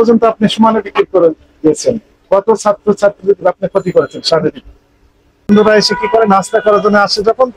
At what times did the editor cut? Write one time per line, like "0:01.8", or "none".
0:05.5